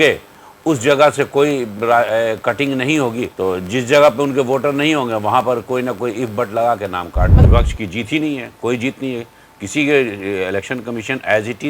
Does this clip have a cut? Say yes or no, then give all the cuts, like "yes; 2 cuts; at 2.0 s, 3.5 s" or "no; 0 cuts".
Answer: yes; 2 cuts; at 3.3 s, 7.4 s